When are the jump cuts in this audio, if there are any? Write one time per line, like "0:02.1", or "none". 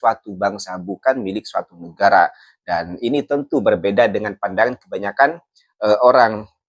none